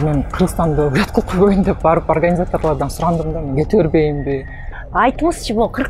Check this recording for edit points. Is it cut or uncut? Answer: cut